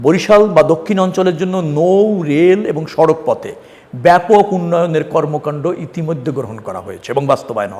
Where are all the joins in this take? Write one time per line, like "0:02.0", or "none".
none

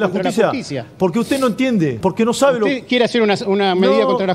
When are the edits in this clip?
0:02.0

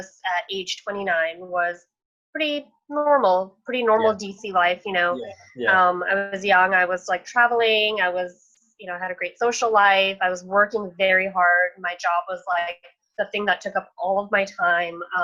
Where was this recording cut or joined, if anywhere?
none

